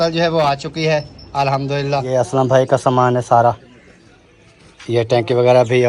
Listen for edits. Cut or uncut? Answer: cut